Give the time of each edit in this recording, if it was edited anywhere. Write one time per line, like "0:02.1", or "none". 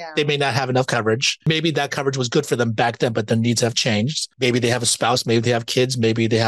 0:01.5
0:04.2